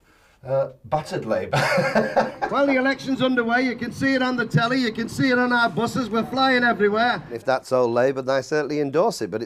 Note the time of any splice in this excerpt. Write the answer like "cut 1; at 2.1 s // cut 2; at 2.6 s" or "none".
cut 1; at 2.4 s // cut 2; at 7.3 s